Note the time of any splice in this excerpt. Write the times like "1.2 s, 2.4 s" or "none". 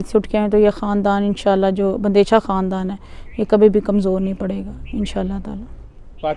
none